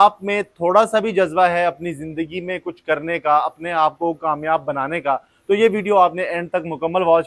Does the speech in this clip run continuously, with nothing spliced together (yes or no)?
yes